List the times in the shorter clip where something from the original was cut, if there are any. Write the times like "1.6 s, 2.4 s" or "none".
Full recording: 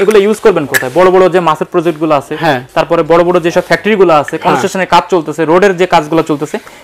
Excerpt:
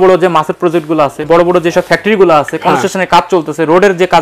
1.3 s